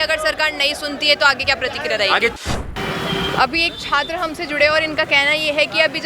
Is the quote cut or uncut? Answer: cut